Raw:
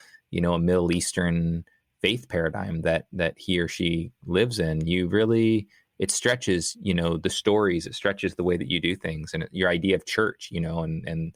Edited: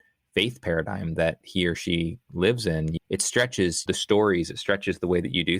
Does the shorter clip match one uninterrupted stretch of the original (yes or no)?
no